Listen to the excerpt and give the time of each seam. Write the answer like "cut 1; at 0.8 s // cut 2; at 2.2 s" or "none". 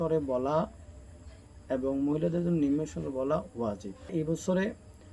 cut 1; at 4.1 s

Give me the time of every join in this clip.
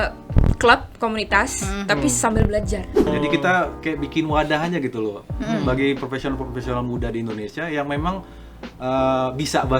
cut 1; at 3.1 s

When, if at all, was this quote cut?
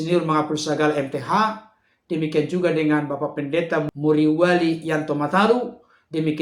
none

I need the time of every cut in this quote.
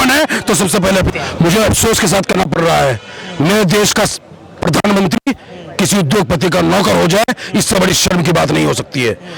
cut 1; at 1.1 s

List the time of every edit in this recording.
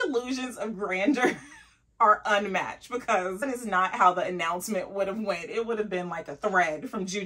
cut 1; at 3.4 s

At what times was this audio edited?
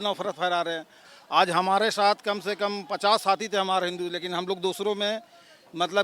cut 1; at 1.0 s

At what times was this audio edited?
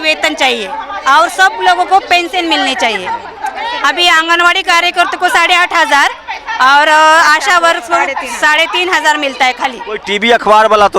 cut 1; at 3.3 s // cut 2; at 9.9 s

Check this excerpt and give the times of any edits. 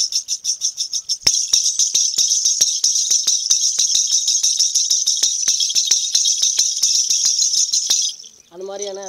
none

